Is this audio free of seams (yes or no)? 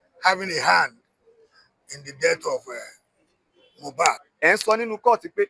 no